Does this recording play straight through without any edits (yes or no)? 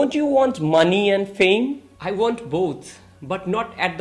yes